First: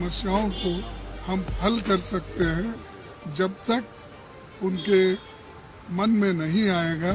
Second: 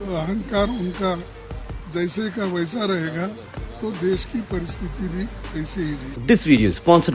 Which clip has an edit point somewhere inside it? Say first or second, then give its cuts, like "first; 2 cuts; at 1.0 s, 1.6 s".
second; 1 cut; at 6.1 s